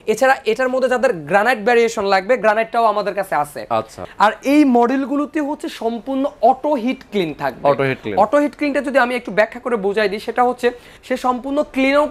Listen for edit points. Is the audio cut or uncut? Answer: cut